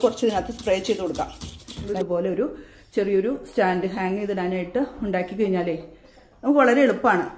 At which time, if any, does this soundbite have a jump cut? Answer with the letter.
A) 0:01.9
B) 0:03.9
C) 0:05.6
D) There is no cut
A